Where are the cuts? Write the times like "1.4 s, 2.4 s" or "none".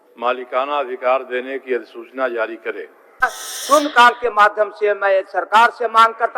3.4 s

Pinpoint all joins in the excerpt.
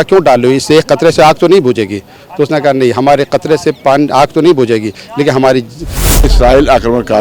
6.3 s

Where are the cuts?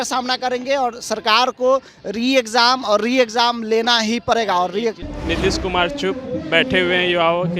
5.1 s

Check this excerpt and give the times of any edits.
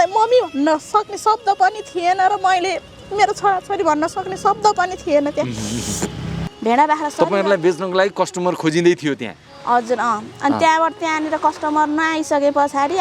6.5 s

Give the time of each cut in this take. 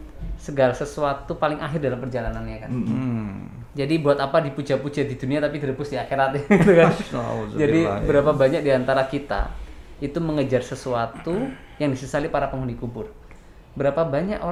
none

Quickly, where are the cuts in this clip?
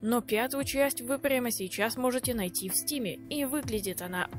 none

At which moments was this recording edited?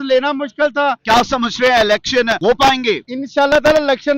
1.0 s, 2.4 s, 3.1 s

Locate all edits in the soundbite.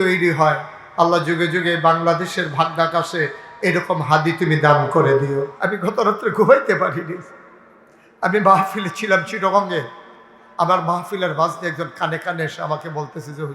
5.6 s

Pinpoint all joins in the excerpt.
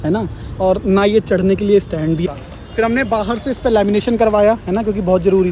2.2 s

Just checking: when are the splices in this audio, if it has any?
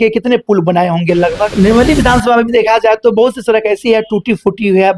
1.5 s

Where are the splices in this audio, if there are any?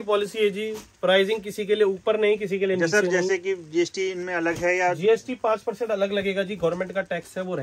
none

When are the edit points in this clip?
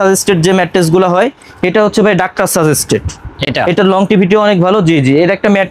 none

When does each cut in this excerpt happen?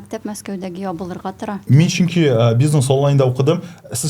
none

